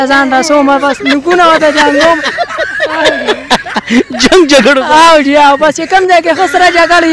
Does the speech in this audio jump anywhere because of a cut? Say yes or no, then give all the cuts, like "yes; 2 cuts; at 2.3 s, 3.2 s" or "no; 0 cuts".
yes; 1 cut; at 2.4 s